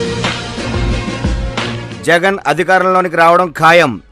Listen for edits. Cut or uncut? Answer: cut